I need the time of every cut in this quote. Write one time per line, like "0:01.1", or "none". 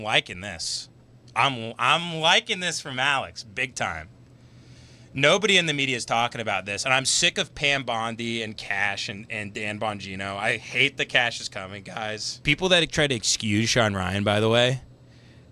0:12.4